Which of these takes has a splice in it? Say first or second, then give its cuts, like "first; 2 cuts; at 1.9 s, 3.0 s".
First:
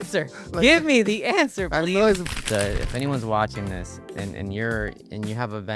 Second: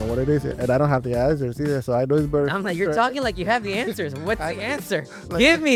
first; 1 cut; at 2.3 s